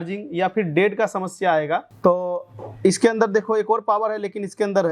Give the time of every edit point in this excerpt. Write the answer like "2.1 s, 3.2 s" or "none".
1.9 s